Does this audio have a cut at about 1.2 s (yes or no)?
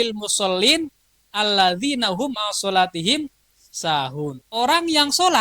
no